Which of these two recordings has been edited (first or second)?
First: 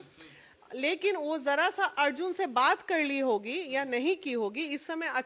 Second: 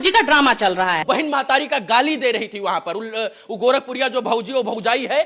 second